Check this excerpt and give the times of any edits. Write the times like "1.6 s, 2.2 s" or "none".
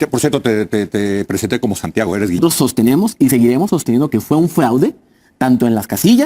2.4 s